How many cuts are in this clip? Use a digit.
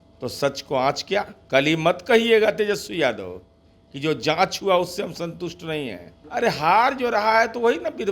2